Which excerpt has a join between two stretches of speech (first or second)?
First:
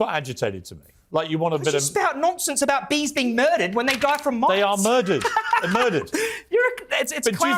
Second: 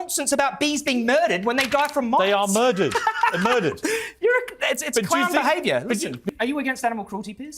second